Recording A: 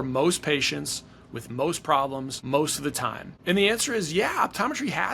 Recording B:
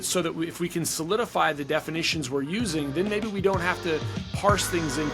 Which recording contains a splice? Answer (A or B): A